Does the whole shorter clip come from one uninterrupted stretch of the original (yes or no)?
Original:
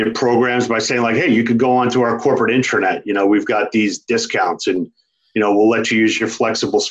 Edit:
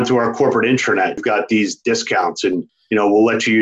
no